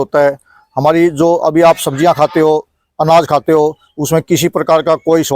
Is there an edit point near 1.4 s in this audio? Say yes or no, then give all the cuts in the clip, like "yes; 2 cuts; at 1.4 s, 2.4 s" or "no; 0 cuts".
no; 0 cuts